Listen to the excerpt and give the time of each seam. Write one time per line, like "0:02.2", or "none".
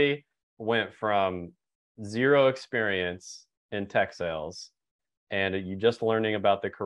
none